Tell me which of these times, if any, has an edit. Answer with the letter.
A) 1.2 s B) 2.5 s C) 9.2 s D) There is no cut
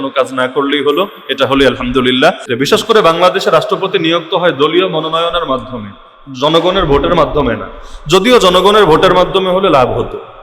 B